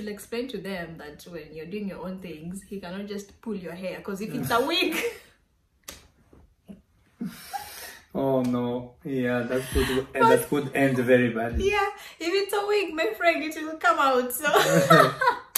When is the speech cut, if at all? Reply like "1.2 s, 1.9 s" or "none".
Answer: none